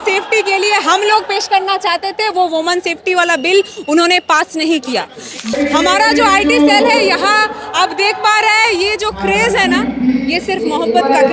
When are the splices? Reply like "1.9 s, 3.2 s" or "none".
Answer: 5.6 s